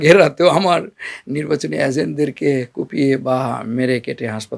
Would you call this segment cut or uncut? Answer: uncut